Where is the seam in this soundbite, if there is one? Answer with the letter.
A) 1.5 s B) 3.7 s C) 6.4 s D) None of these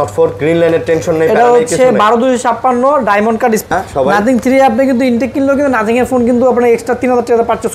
B